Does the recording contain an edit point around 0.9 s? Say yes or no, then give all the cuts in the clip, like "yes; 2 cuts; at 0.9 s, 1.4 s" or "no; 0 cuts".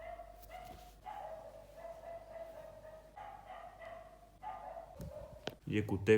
yes; 2 cuts; at 0.9 s, 3.1 s